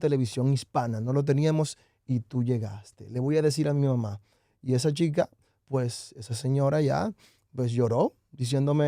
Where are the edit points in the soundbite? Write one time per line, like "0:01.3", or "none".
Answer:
none